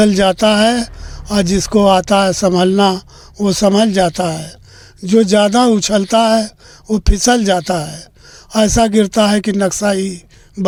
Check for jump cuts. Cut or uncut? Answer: uncut